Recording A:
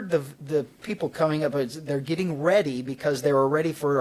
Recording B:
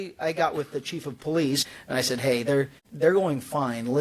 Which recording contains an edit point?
B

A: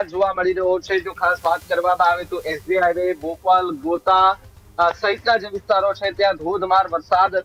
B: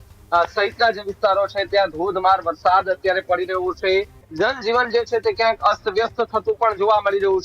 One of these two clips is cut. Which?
B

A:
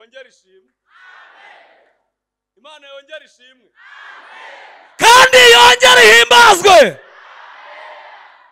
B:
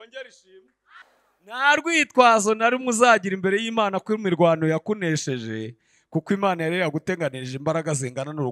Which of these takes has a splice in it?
B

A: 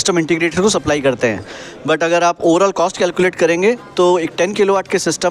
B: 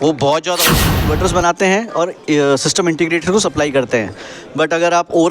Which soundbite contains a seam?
B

